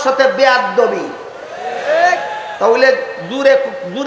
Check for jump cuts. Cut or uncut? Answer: uncut